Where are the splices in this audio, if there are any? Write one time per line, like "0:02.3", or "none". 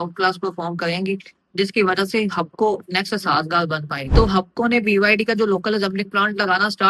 0:04.1